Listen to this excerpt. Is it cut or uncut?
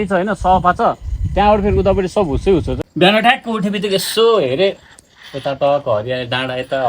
cut